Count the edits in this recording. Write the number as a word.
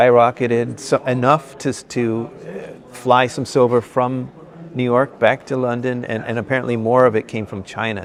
zero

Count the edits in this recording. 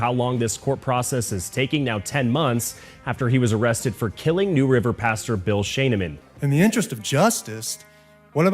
one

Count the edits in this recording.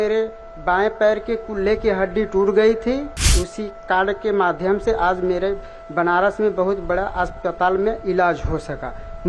one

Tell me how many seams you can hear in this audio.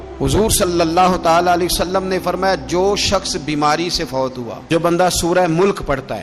one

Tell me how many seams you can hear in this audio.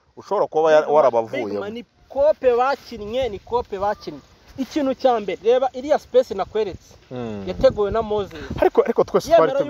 zero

